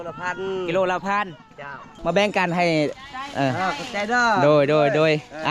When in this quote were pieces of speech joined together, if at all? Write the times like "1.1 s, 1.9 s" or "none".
2.0 s